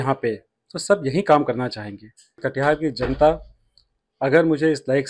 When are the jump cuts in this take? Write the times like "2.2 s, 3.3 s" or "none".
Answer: 2.4 s